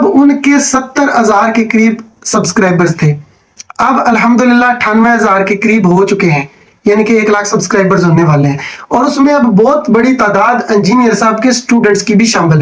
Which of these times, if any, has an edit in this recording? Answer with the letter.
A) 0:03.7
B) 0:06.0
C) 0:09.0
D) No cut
D